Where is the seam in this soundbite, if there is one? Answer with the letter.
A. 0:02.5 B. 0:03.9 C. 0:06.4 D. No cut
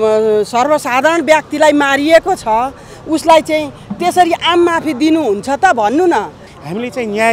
C